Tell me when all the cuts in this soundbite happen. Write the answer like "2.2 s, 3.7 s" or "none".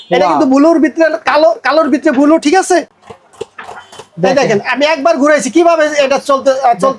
2.9 s